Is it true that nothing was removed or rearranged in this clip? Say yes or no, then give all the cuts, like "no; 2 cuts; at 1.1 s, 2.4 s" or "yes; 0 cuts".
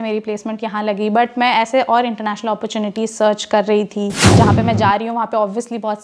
no; 1 cut; at 4.2 s